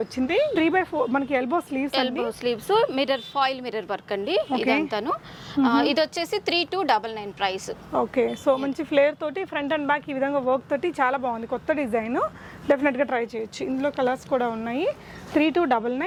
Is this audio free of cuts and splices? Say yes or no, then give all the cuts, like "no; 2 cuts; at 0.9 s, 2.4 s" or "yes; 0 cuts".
yes; 0 cuts